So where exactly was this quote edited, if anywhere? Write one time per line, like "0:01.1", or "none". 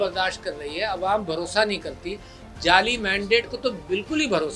none